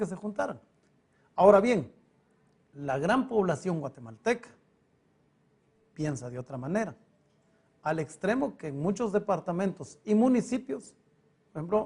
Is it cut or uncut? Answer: cut